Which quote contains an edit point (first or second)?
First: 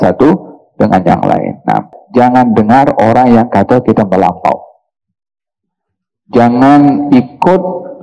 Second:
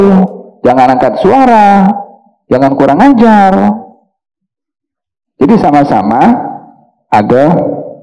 first